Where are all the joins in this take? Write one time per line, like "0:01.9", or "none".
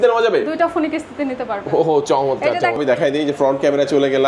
0:02.8